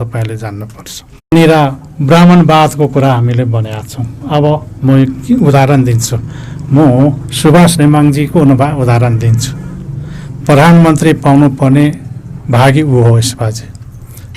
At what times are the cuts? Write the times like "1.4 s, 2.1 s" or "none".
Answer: 1.3 s